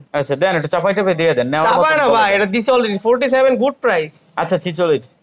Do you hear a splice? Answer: no; 0 cuts

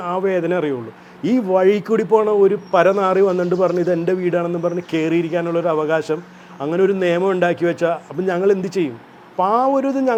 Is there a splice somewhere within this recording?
no; 0 cuts

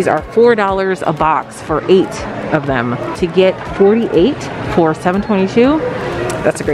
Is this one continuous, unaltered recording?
no; 1 cut; at 3.1 s

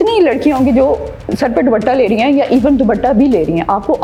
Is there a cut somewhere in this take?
no; 0 cuts

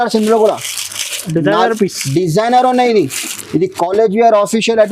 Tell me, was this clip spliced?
no; 0 cuts

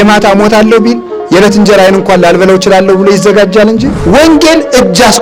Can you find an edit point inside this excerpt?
yes; 2 cuts; at 1.1 s, 4.2 s

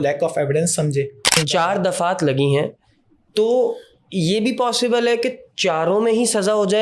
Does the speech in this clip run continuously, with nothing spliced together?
no; 1 cut; at 1.4 s

